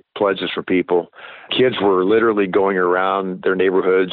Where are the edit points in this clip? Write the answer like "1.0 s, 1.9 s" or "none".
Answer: 1.5 s